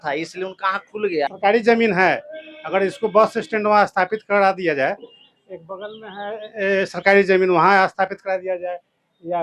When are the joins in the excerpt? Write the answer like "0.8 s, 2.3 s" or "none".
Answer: 1.3 s